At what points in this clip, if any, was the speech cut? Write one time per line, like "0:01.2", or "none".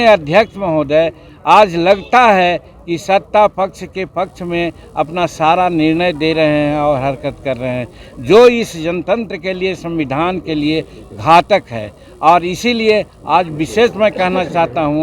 none